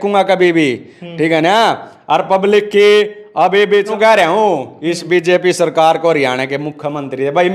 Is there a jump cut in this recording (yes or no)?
yes